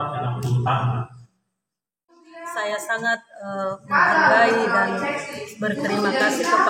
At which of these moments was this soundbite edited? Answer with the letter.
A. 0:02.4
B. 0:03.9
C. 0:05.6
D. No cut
A